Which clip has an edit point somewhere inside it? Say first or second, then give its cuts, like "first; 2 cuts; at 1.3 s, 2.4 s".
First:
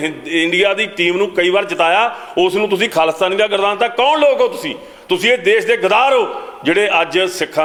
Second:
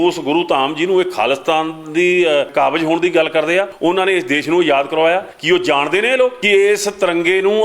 second; 4 cuts; at 2.5 s, 3.7 s, 5.3 s, 6.4 s